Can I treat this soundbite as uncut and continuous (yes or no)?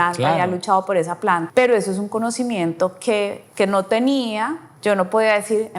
no